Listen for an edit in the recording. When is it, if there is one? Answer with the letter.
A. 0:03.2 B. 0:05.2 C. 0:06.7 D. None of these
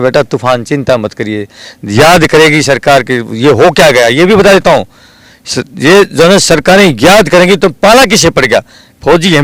D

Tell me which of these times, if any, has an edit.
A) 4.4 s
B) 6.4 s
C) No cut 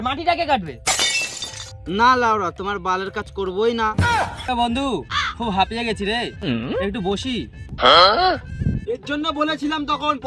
A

